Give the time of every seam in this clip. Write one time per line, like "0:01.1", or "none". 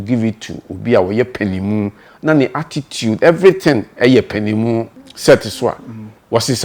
0:05.0